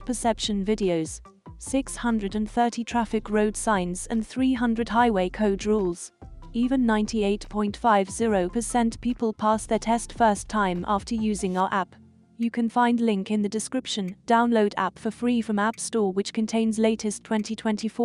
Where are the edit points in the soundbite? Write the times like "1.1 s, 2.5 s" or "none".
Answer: none